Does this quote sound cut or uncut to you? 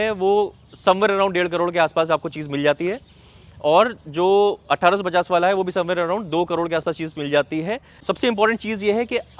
cut